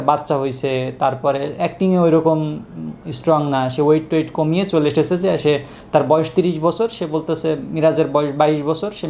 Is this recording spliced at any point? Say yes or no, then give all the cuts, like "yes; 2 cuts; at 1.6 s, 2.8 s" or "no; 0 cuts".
no; 0 cuts